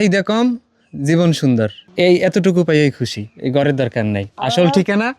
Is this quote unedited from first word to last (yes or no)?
no